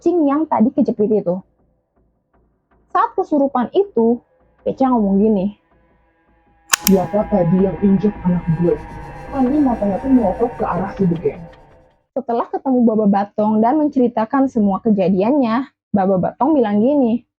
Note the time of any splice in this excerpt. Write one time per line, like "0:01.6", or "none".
0:12.1